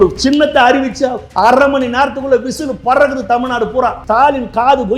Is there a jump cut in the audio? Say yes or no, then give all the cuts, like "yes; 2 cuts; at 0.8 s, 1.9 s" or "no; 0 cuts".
yes; 1 cut; at 4.0 s